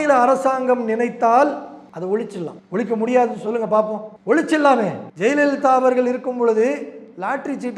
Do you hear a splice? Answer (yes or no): yes